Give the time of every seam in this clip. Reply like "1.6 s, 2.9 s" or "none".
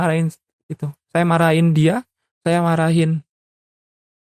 none